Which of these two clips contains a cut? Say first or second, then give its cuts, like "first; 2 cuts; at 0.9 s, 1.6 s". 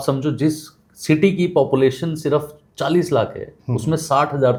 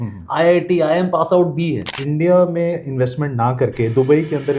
second; 1 cut; at 2.0 s